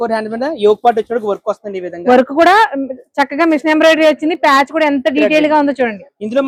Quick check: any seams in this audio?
no; 0 cuts

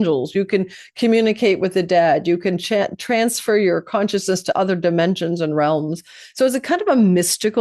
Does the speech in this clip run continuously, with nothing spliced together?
yes; 0 cuts

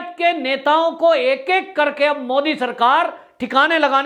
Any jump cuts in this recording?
no; 0 cuts

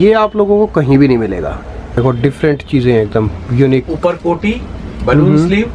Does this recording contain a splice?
yes; 1 cut; at 2.0 s

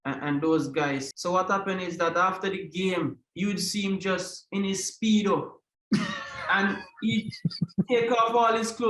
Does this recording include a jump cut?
yes; 1 cut; at 1.1 s

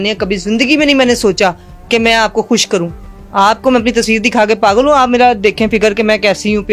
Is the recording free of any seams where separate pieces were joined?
yes; 0 cuts

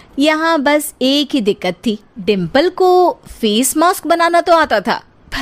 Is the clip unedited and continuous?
no; 1 cut; at 2.1 s

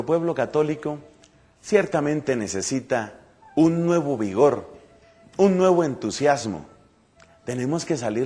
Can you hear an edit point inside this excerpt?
no; 0 cuts

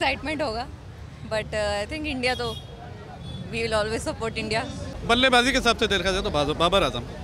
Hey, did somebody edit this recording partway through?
yes; 1 cut; at 4.9 s

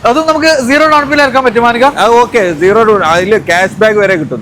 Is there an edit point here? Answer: no; 0 cuts

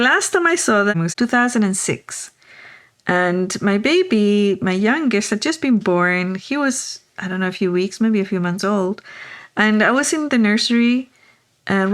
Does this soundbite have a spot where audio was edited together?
yes; 1 cut; at 0.9 s

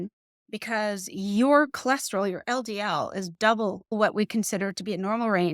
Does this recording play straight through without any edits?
no; 1 cut; at 3.9 s

